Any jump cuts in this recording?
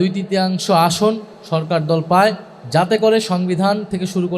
yes; 2 cuts; at 1.3 s, 2.5 s

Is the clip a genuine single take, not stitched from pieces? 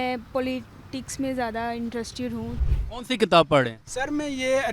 no; 1 cut; at 2.6 s

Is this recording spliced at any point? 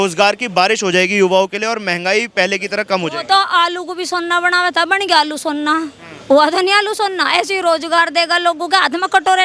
no; 0 cuts

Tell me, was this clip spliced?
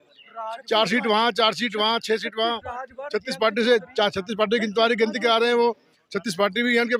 no; 0 cuts

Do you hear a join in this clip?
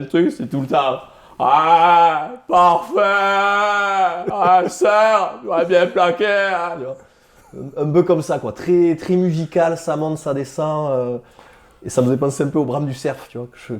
no; 0 cuts

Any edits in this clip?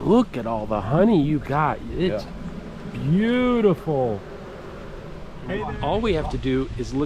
yes; 1 cut; at 5.7 s

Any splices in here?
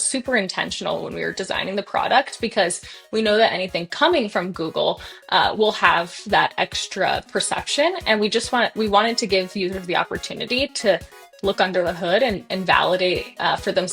no; 0 cuts

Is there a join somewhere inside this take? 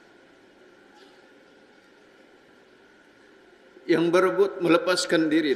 no; 0 cuts

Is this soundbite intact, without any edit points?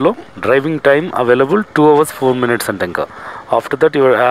yes; 0 cuts

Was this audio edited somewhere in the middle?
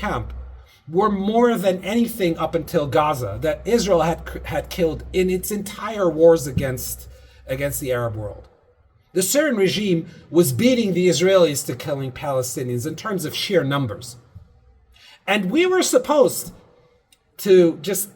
no; 0 cuts

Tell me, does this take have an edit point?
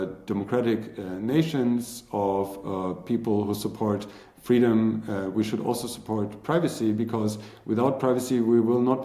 no; 0 cuts

